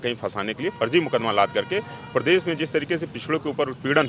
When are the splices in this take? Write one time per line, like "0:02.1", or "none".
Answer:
none